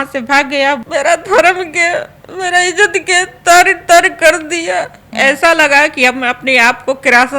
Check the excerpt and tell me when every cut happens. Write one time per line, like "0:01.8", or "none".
0:00.8
0:05.0